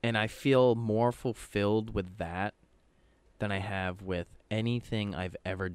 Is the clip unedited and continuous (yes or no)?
yes